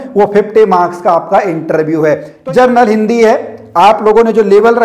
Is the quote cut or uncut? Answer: cut